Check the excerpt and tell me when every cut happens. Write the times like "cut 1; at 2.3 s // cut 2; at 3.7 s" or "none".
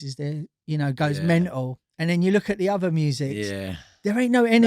none